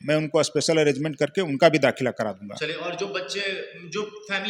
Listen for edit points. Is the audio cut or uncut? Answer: uncut